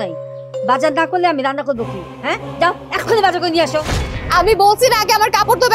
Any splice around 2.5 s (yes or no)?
no